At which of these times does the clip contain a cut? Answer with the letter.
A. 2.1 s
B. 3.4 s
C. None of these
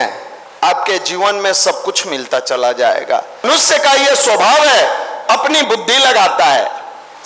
B